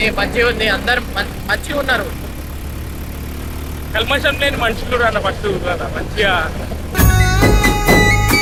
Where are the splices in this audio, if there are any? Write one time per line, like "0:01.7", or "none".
none